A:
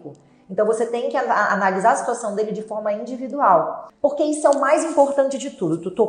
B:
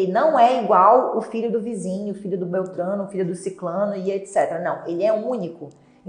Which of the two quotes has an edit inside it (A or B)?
A